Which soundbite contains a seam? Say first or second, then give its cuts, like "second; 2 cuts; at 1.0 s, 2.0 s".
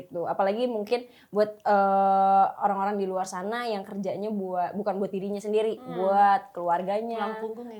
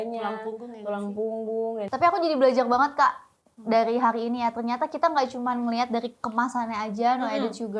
second; 1 cut; at 1.9 s